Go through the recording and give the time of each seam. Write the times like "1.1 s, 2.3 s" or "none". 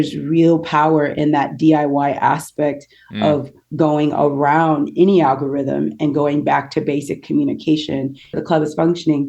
8.4 s